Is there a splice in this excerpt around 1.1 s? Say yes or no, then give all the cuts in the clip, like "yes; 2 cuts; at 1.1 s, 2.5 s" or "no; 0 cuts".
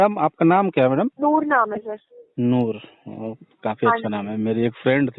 yes; 1 cut; at 1.1 s